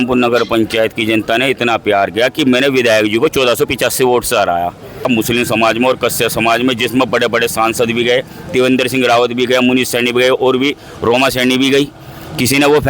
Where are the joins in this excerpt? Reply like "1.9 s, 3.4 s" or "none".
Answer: 5.1 s